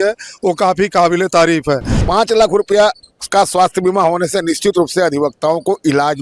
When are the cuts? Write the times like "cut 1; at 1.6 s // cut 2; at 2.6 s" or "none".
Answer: cut 1; at 1.9 s